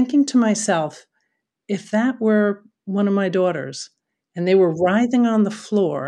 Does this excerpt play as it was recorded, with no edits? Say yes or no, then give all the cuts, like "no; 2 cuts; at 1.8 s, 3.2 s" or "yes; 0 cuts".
yes; 0 cuts